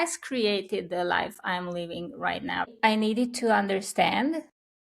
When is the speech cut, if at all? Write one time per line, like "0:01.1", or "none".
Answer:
0:02.7